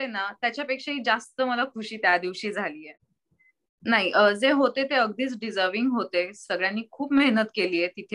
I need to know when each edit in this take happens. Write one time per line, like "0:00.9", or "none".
0:02.8